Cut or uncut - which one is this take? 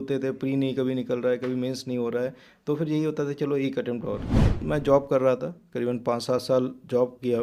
cut